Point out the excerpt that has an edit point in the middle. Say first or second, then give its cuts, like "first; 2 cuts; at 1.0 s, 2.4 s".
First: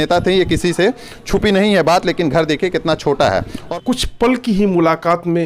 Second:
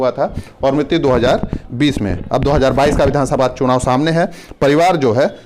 first; 1 cut; at 3.6 s